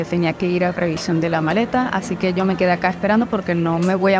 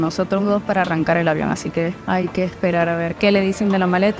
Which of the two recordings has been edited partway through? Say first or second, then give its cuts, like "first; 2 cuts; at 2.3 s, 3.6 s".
second; 2 cuts; at 2.0 s, 3.1 s